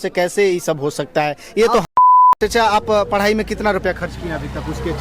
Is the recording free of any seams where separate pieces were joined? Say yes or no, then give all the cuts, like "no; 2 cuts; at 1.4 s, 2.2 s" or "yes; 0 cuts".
no; 1 cut; at 2.4 s